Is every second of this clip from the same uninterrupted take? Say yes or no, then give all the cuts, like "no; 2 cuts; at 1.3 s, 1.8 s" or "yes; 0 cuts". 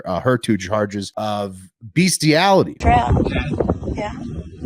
no; 2 cuts; at 1.1 s, 2.7 s